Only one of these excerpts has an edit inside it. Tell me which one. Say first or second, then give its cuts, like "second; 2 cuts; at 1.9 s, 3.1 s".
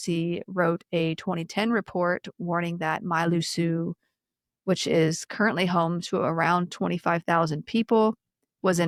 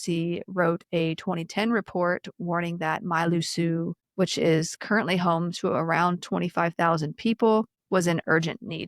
second; 2 cuts; at 4.0 s, 7.8 s